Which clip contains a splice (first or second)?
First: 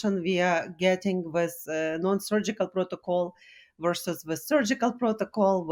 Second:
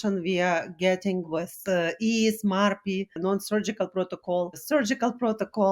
second